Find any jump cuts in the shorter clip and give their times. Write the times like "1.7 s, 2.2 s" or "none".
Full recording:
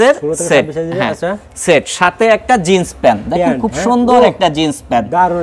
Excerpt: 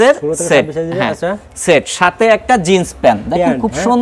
none